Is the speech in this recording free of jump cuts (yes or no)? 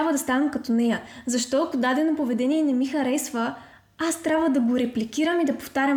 yes